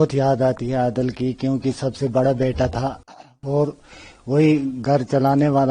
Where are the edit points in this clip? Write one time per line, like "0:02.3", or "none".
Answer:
none